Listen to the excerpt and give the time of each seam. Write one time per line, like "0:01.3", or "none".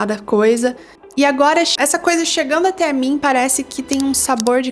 0:01.7